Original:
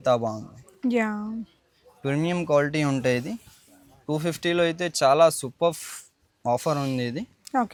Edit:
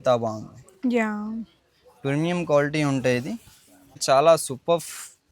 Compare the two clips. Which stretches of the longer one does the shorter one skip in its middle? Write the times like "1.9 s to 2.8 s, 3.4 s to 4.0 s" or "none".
4.0 s to 4.9 s